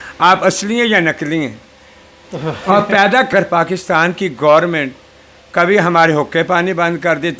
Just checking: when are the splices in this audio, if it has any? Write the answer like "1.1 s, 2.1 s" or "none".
3.3 s